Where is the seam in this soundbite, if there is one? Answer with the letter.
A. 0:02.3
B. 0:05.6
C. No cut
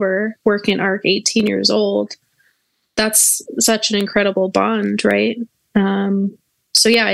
C